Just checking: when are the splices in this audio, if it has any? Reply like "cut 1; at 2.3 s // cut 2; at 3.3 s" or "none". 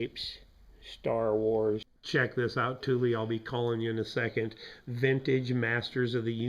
cut 1; at 1.9 s